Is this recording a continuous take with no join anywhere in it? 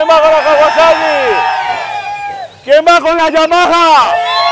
yes; 0 cuts

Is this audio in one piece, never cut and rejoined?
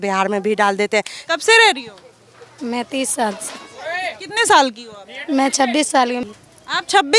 no; 2 cuts; at 1.2 s, 6.2 s

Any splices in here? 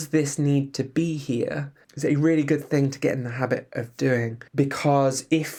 no; 0 cuts

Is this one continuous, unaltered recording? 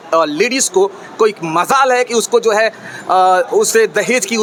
yes; 0 cuts

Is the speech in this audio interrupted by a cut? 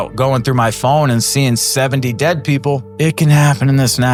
no; 0 cuts

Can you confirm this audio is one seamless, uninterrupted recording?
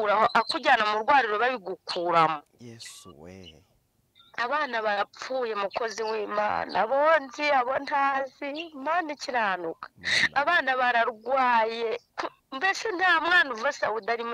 yes; 0 cuts

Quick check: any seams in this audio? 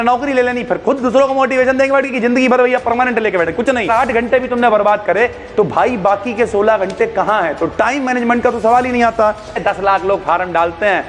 yes; 2 cuts; at 3.9 s, 9.6 s

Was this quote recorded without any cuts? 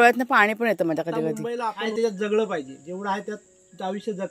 no; 1 cut; at 1.9 s

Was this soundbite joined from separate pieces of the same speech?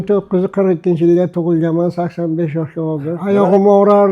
yes; 1 cut; at 3.1 s

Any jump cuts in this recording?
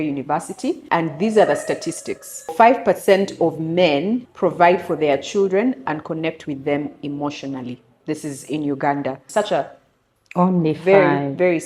yes; 4 cuts; at 0.8 s, 2.5 s, 4.3 s, 9.2 s

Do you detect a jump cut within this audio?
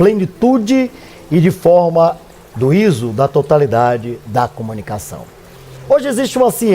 yes; 1 cut; at 5.8 s

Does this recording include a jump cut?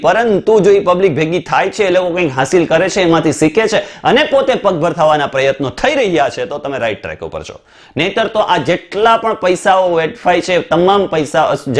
no; 0 cuts

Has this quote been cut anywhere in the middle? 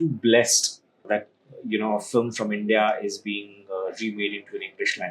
yes; 1 cut; at 1.1 s

